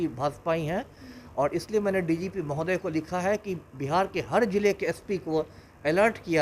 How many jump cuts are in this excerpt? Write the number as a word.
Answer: zero